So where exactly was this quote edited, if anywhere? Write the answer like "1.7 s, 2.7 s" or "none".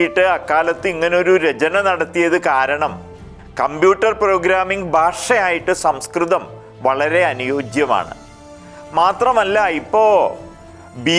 none